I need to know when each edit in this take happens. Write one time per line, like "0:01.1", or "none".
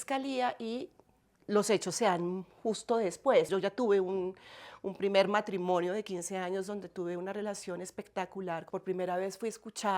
0:03.5
0:08.7